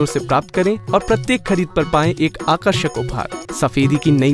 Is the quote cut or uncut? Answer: cut